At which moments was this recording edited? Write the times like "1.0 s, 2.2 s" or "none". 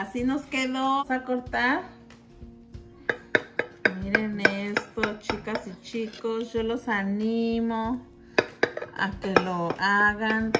1.0 s